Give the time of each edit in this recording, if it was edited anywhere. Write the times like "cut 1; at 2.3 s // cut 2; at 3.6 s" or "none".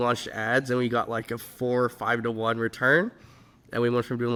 none